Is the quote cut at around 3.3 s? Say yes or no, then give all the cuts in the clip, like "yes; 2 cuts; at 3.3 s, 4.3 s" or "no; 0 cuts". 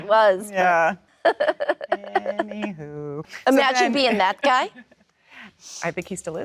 yes; 2 cuts; at 1.1 s, 3.3 s